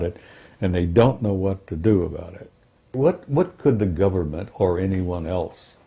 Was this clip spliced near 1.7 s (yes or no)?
no